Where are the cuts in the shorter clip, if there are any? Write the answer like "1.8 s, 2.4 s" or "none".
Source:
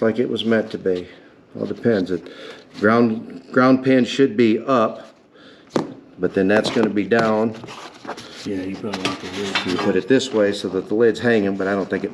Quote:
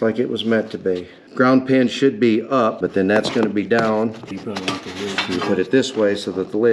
1.2 s, 2.8 s, 4.4 s